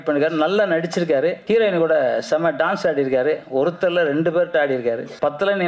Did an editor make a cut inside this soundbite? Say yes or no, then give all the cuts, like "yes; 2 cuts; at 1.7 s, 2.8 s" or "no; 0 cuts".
no; 0 cuts